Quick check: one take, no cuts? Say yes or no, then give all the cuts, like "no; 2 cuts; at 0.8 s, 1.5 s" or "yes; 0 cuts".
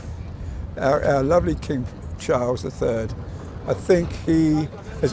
yes; 0 cuts